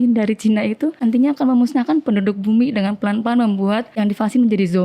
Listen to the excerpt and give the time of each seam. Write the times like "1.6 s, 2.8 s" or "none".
1.0 s, 3.9 s